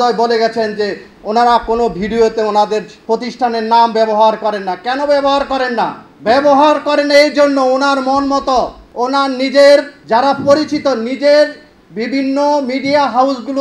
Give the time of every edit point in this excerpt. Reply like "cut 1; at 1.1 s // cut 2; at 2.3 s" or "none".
cut 1; at 2.9 s // cut 2; at 6.1 s // cut 3; at 8.8 s // cut 4; at 10.0 s